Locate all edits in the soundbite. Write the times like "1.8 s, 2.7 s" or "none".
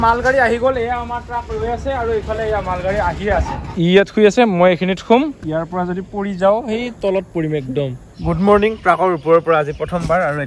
3.7 s, 5.4 s, 8.1 s